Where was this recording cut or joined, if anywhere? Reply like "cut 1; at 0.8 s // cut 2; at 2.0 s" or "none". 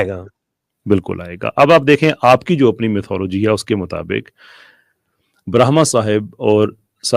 none